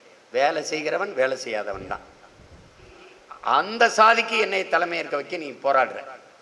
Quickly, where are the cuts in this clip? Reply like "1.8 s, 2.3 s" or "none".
2.9 s